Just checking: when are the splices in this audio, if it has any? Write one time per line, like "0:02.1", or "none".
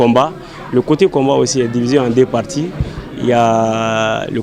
none